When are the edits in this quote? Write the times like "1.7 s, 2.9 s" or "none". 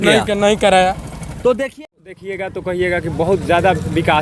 1.6 s